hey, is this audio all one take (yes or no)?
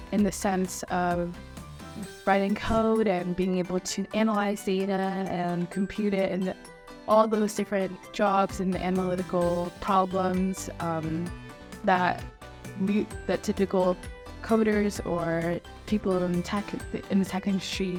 yes